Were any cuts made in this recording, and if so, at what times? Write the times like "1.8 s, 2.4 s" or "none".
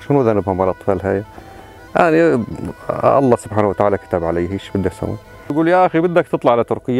5.5 s